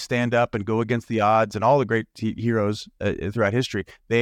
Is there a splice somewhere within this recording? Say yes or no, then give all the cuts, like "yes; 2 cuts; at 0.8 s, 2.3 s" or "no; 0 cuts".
no; 0 cuts